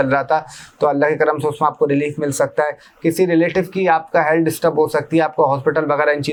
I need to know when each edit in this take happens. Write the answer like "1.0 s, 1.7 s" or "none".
none